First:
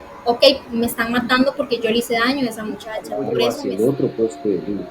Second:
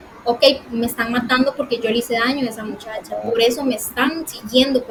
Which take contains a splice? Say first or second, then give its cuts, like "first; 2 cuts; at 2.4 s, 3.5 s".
first; 1 cut; at 3.5 s